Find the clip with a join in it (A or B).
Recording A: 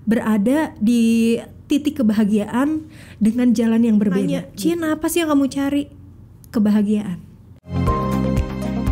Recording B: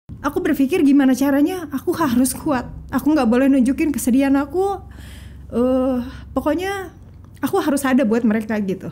A